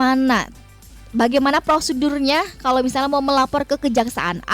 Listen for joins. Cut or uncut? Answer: uncut